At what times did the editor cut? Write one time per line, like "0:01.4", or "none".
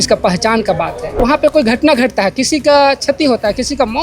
0:01.2